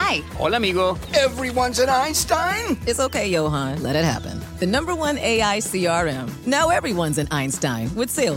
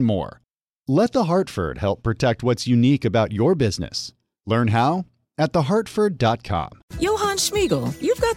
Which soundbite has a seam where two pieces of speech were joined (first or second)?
second